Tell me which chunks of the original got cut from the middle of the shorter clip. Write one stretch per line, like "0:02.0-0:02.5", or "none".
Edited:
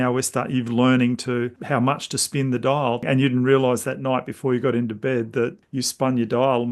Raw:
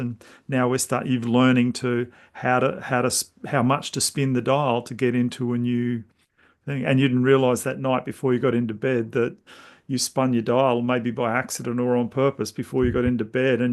0:02.1-0:03.4
0:04.8-0:06.8
0:09.4-0:09.8